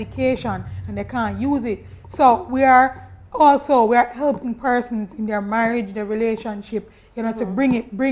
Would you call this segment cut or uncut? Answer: uncut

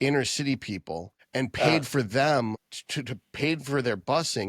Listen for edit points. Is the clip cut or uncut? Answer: cut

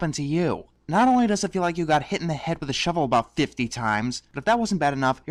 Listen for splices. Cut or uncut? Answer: uncut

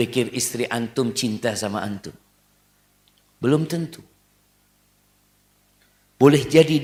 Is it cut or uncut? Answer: uncut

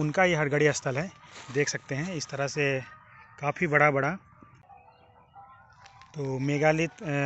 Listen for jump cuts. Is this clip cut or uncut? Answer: cut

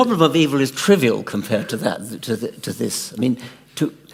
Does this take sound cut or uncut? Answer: uncut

